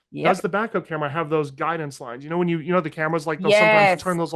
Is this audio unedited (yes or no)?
yes